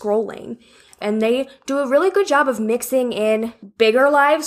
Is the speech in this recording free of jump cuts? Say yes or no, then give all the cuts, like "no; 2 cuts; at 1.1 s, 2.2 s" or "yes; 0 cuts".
no; 2 cuts; at 1.0 s, 3.6 s